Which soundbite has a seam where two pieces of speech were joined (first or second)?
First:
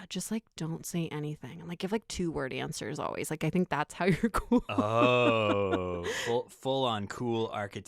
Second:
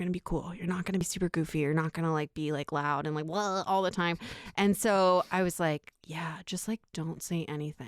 second